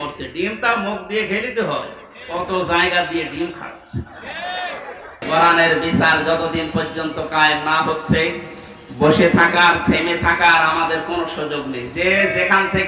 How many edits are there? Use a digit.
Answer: 1